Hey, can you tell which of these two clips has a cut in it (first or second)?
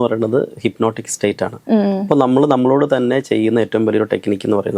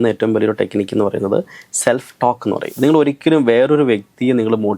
second